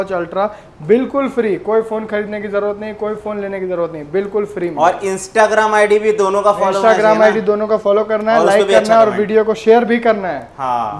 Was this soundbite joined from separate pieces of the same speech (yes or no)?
no